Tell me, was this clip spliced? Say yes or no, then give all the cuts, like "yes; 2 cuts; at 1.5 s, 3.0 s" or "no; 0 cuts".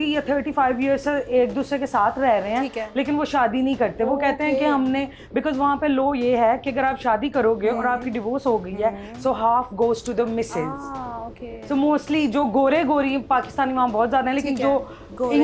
no; 0 cuts